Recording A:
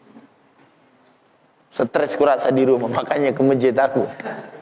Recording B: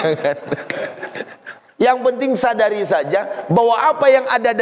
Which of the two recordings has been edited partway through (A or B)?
B